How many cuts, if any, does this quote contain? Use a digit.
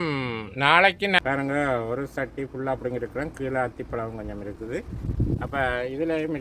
1